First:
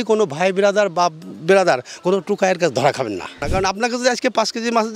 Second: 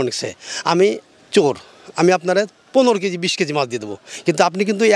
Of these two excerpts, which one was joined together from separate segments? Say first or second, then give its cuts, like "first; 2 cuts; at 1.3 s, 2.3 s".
first; 1 cut; at 3.3 s